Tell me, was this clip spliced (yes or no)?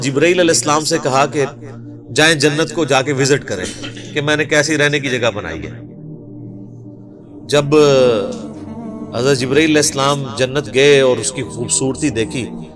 no